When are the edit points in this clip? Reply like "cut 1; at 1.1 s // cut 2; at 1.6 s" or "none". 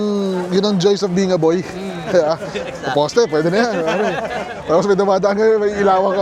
none